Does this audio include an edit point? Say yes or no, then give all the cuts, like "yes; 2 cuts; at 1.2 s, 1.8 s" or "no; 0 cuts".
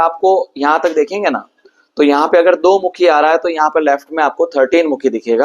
no; 0 cuts